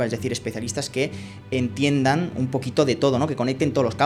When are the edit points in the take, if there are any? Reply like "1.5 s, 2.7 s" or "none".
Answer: none